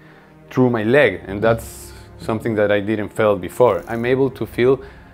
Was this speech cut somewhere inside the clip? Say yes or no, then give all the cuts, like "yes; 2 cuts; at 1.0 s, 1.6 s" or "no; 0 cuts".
yes; 1 cut; at 3.9 s